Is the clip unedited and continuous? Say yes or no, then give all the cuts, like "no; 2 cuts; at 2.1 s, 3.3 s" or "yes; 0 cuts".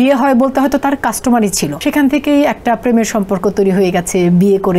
no; 1 cut; at 1.7 s